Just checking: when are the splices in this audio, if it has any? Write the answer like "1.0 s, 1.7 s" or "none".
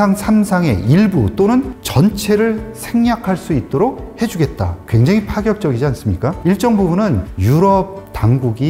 4.8 s, 6.4 s